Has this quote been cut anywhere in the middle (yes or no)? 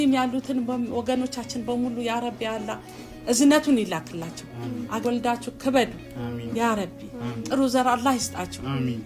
yes